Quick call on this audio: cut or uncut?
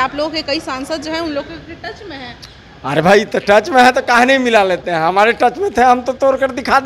uncut